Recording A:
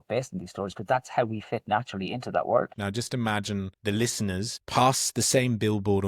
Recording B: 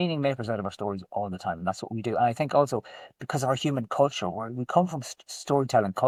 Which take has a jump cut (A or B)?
A